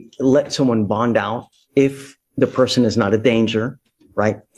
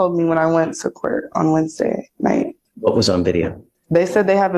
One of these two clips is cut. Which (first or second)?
second